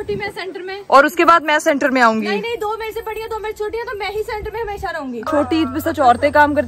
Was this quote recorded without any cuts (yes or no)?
no